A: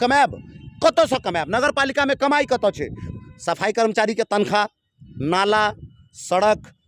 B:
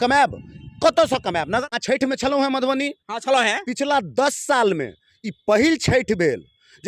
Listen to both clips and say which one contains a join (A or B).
B